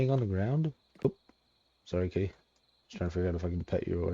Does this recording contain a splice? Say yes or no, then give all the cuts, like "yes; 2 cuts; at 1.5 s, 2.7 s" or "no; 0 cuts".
yes; 1 cut; at 1.0 s